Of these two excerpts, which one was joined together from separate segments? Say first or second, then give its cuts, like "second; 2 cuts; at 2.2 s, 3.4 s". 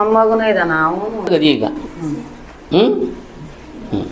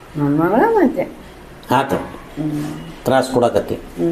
first; 1 cut; at 1.3 s